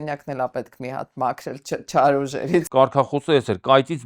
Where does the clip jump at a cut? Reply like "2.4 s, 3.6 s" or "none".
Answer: 2.7 s